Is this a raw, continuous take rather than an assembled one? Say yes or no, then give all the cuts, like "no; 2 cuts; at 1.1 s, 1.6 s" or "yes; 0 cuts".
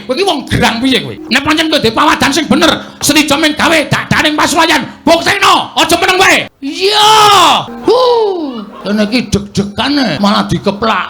no; 5 cuts; at 1.2 s, 6.6 s, 7.7 s, 8.7 s, 10.2 s